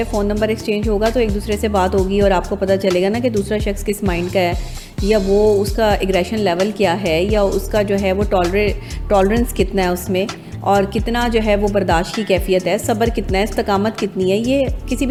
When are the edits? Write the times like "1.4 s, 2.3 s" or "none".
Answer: none